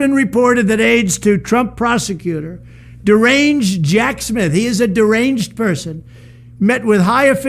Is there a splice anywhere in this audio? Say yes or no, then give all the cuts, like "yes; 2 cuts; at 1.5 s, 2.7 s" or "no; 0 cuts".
no; 0 cuts